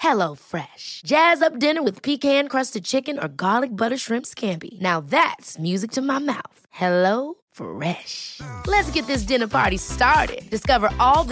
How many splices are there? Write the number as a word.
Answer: zero